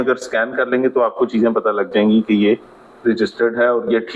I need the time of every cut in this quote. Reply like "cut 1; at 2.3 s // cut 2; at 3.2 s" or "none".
none